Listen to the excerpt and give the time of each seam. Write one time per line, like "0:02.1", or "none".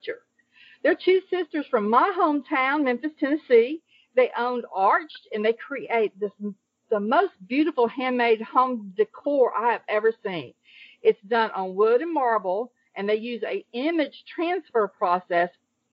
none